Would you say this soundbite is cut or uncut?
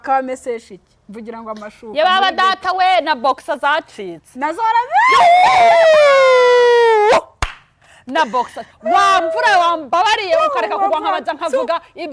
uncut